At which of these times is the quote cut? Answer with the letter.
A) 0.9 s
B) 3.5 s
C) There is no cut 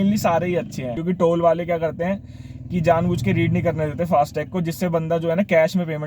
A